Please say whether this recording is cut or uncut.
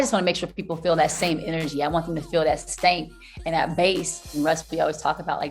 cut